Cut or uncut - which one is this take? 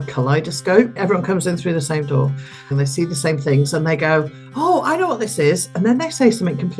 cut